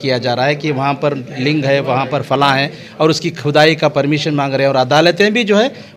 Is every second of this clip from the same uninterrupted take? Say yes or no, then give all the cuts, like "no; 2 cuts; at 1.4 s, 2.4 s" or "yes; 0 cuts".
yes; 0 cuts